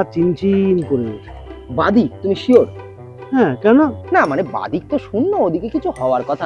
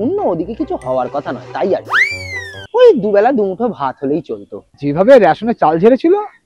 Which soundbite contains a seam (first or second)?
second